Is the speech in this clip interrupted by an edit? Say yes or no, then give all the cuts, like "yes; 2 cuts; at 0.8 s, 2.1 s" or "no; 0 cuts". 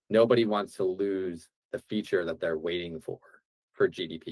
no; 0 cuts